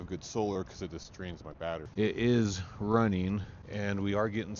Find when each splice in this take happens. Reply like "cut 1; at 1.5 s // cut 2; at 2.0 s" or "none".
cut 1; at 1.9 s